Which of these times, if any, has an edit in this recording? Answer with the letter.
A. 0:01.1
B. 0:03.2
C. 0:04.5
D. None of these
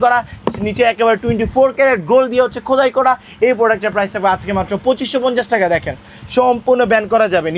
D